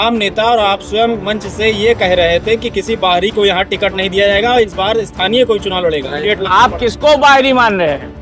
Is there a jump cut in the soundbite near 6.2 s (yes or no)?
yes